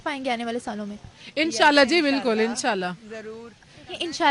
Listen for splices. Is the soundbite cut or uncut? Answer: uncut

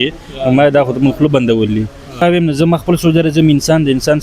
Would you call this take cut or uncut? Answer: cut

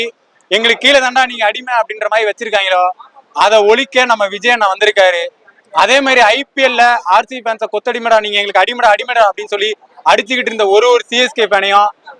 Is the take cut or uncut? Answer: uncut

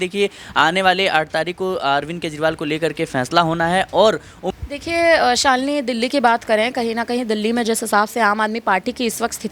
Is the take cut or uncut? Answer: cut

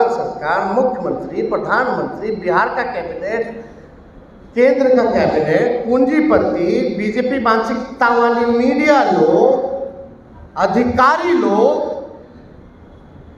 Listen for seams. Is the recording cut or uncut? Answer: uncut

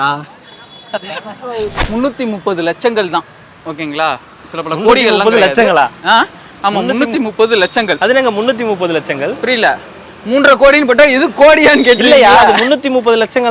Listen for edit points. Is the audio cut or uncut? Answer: cut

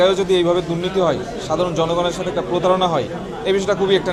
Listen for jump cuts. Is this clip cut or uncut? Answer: uncut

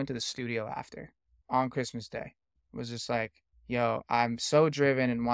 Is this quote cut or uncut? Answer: cut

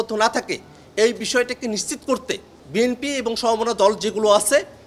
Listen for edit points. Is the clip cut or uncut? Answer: cut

